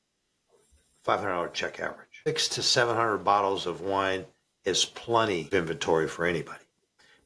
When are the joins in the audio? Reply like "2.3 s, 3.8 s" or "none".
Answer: 2.3 s, 5.4 s